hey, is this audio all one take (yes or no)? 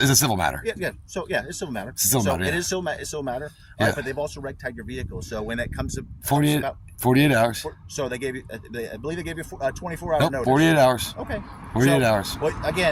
yes